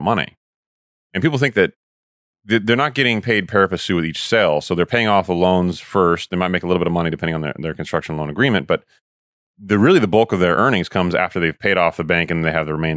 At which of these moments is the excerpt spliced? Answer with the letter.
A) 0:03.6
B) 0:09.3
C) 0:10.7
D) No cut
D